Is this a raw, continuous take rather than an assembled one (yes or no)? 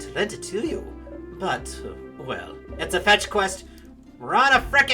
no